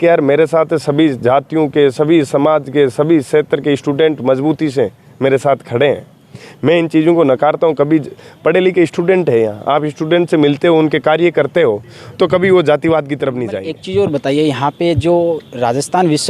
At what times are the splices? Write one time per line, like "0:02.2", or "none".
0:13.5